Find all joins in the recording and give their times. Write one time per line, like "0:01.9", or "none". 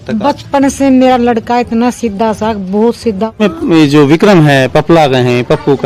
0:03.4